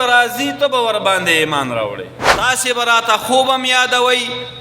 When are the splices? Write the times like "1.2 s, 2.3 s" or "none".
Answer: 2.2 s